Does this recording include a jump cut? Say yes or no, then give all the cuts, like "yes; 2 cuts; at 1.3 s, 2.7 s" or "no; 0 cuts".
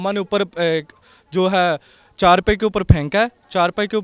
no; 0 cuts